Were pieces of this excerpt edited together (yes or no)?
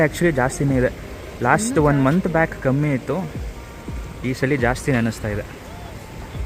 no